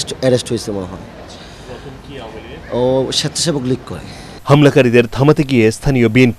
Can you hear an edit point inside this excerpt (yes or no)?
no